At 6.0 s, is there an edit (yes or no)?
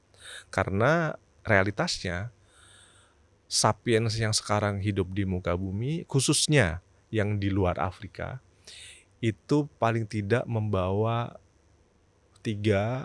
no